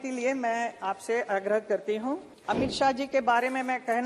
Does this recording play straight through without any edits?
no; 1 cut; at 2.3 s

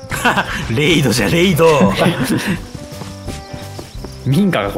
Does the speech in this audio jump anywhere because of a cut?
no; 0 cuts

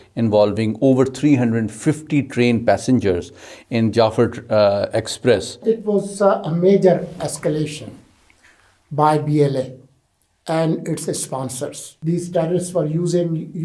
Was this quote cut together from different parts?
yes; 2 cuts; at 5.6 s, 11.9 s

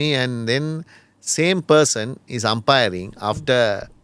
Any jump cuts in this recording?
no; 0 cuts

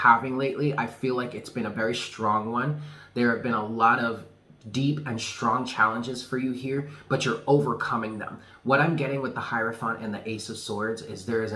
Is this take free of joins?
yes; 0 cuts

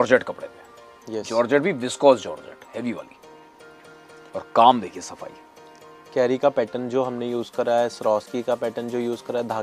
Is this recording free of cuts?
yes; 0 cuts

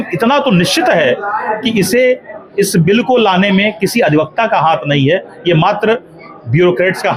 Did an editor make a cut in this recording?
no; 0 cuts

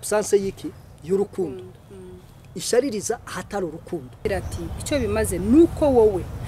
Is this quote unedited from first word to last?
no; 1 cut; at 4.2 s

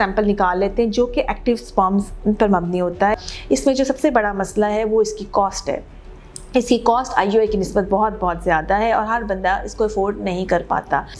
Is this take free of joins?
no; 1 cut; at 3.2 s

